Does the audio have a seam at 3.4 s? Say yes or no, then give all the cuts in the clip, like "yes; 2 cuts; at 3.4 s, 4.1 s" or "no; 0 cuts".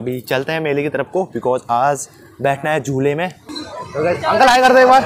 yes; 1 cut; at 3.4 s